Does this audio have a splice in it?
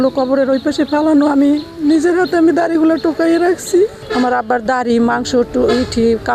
yes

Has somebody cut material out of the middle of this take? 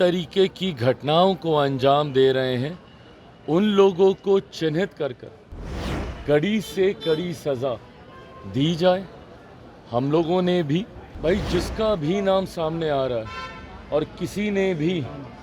yes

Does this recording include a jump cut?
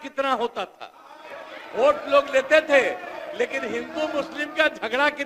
no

